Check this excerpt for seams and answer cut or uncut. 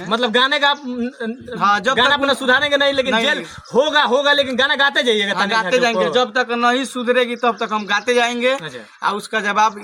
uncut